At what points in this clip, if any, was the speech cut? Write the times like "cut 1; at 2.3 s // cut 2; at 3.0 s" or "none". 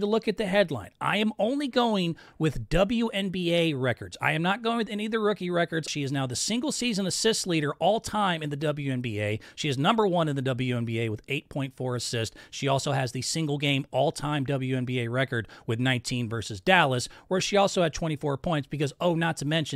cut 1; at 5.9 s